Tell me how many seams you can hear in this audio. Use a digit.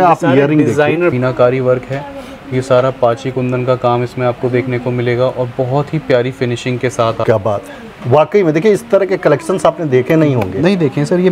2